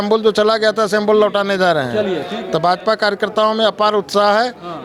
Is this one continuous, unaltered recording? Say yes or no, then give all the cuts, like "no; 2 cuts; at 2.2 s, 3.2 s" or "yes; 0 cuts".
yes; 0 cuts